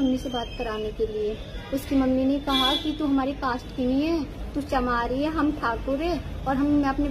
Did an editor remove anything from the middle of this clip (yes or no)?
no